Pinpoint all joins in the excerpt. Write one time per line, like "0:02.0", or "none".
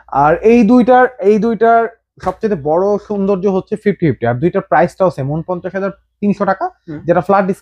none